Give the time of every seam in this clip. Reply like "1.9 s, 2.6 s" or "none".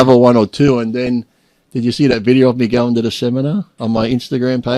3.9 s